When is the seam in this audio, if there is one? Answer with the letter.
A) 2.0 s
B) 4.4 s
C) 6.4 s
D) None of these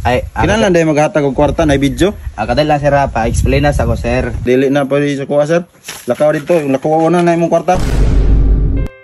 B